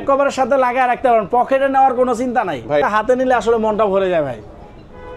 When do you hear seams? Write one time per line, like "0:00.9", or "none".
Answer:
0:02.8